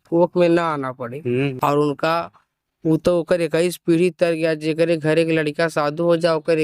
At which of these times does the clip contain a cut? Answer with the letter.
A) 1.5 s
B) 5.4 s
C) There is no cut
A